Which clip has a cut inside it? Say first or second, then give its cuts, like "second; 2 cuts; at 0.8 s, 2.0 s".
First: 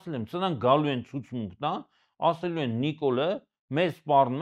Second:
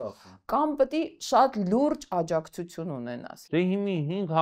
second; 1 cut; at 3.4 s